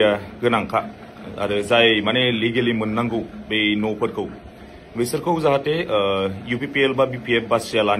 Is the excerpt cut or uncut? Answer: uncut